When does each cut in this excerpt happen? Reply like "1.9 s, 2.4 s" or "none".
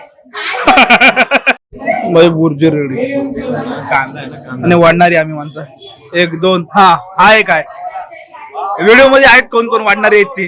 1.6 s